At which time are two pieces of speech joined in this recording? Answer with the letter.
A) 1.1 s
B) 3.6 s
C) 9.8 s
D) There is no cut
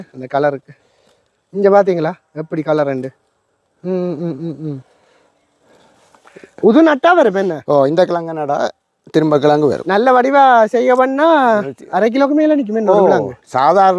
D